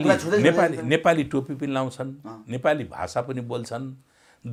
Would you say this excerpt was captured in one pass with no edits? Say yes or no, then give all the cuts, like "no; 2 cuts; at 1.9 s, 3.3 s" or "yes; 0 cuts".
yes; 0 cuts